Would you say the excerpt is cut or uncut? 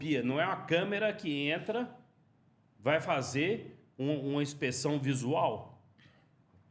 uncut